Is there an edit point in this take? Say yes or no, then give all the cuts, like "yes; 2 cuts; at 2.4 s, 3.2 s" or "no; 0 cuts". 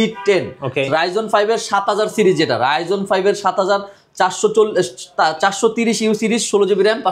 no; 0 cuts